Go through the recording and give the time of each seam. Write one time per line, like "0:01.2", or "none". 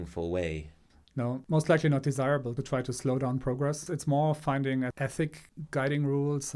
0:01.4
0:02.6
0:03.8
0:05.0